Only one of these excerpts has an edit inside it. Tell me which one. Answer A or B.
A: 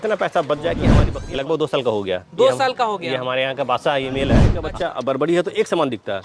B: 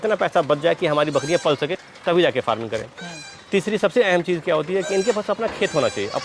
A